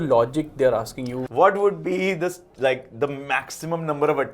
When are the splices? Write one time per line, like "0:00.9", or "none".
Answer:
0:01.2